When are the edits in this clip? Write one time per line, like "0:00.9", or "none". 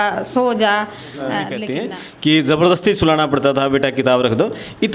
0:01.6